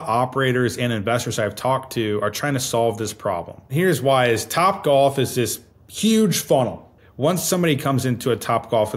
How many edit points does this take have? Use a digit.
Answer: 2